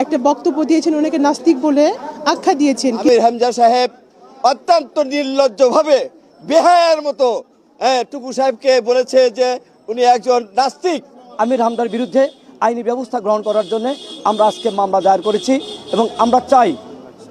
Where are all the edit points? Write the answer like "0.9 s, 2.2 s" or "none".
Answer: 3.1 s, 11.2 s